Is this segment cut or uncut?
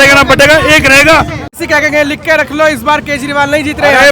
cut